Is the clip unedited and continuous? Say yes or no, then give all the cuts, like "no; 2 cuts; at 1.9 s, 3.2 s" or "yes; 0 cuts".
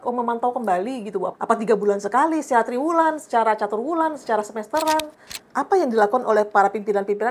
no; 2 cuts; at 1.3 s, 5.4 s